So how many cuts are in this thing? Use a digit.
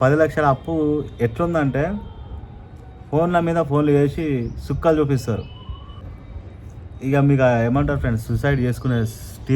1